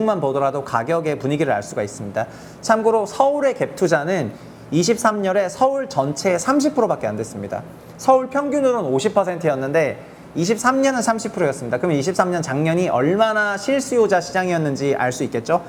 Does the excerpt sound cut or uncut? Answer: uncut